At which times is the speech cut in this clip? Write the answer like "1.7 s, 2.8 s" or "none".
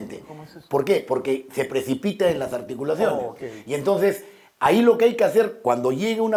none